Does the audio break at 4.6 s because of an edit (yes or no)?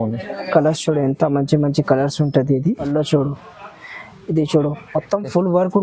no